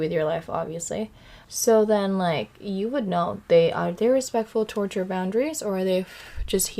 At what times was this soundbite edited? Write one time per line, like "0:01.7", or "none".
0:01.3